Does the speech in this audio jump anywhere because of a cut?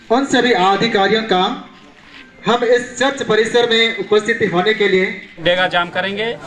yes; 1 cut; at 5.3 s

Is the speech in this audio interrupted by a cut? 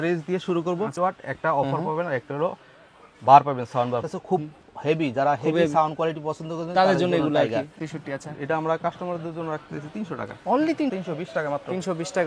yes; 4 cuts; at 0.9 s, 4.0 s, 7.8 s, 10.9 s

